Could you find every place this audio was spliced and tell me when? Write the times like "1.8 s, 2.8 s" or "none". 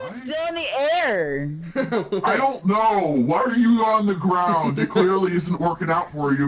none

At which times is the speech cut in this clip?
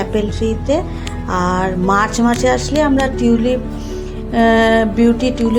none

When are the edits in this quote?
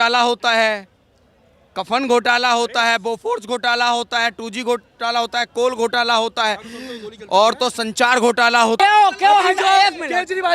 8.8 s

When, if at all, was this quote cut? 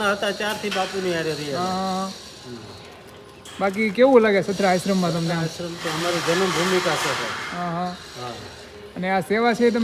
none

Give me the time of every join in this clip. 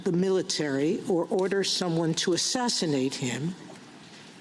none

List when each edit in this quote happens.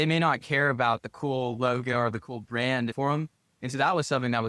2.9 s

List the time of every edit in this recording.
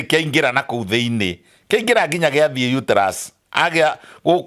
none

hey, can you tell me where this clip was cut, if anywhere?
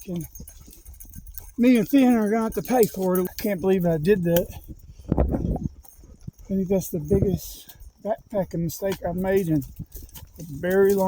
3.2 s

